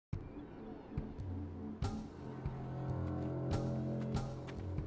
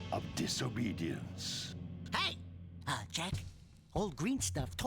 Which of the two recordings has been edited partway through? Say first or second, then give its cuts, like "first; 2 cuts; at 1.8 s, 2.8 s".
second; 1 cut; at 1.9 s